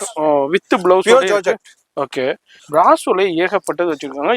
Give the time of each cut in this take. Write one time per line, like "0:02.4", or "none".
0:02.5